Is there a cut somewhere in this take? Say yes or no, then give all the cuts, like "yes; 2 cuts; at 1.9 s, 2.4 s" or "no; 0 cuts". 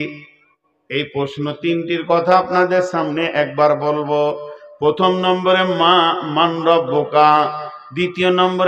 no; 0 cuts